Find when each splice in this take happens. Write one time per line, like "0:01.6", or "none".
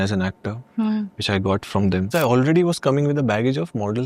0:02.1